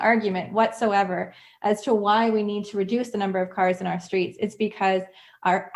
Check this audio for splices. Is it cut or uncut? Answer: uncut